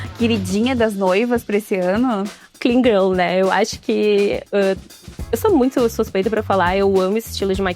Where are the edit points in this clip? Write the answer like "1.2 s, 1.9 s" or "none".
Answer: 2.5 s